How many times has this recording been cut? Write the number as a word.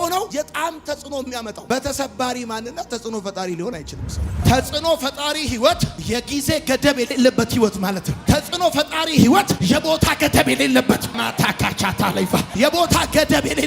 one